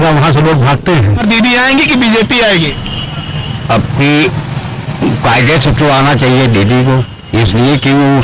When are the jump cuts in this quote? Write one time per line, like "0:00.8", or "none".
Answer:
0:01.2